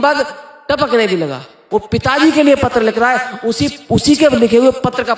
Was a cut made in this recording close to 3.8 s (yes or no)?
no